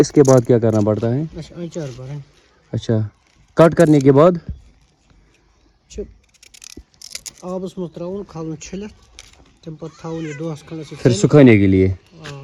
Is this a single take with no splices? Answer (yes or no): yes